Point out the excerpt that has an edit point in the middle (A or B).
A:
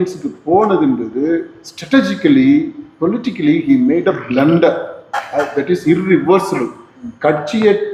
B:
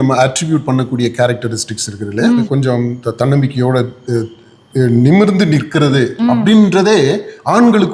B